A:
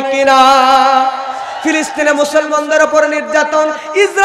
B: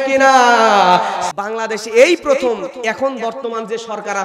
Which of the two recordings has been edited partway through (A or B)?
B